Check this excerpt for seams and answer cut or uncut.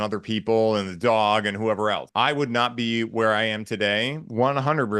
cut